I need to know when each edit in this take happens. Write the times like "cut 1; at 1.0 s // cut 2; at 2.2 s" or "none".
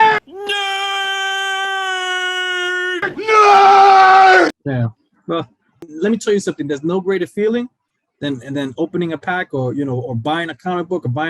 cut 1; at 5.9 s